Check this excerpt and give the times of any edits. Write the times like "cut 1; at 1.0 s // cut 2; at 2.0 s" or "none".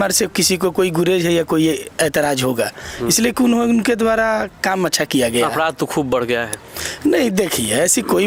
none